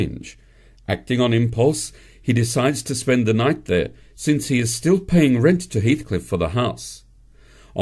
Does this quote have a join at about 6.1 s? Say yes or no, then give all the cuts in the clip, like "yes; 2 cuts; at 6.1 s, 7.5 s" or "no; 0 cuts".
yes; 1 cut; at 6.1 s